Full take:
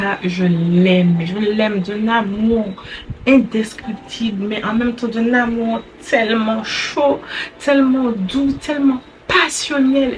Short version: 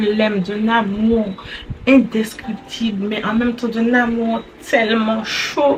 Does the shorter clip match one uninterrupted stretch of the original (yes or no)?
yes